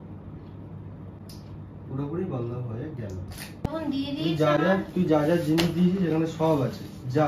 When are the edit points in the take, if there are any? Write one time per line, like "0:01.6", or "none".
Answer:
0:03.7